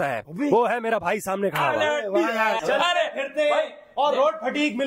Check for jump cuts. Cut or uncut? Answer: cut